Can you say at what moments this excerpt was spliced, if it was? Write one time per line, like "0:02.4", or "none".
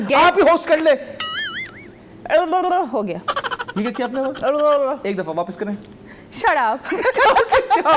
none